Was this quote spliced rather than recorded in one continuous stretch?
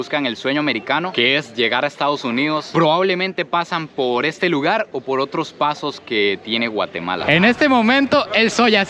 yes; 1 cut; at 7.2 s

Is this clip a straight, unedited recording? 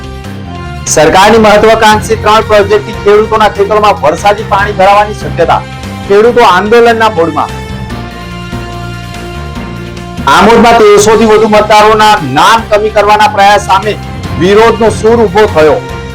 no; 1 cut; at 0.9 s

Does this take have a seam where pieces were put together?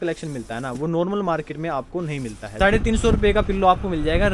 yes; 1 cut; at 2.4 s

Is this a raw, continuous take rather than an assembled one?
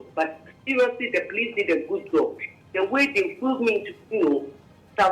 yes; 0 cuts

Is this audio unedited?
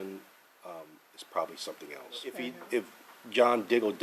no; 1 cut; at 2.5 s

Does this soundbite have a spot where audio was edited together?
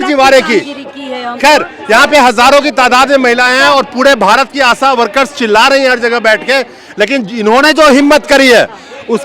no; 0 cuts

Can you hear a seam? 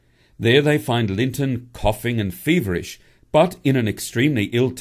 no; 0 cuts

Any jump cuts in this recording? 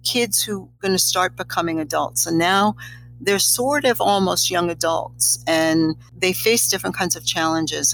yes; 1 cut; at 6.1 s

